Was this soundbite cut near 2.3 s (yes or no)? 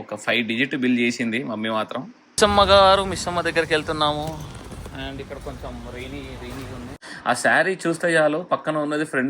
yes